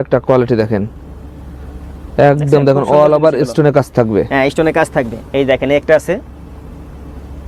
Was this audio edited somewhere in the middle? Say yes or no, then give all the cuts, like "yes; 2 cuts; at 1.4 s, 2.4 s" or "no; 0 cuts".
no; 0 cuts